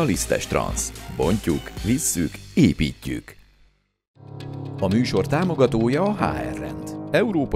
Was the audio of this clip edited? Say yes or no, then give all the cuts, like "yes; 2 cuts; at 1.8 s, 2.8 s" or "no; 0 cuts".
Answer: no; 0 cuts